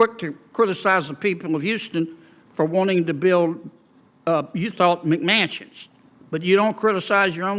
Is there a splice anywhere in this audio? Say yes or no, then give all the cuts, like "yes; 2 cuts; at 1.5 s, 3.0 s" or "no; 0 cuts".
no; 0 cuts